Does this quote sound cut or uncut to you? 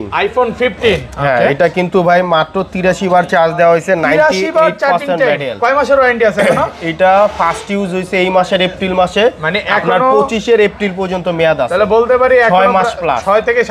uncut